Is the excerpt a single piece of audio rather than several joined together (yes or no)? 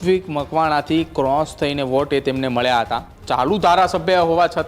no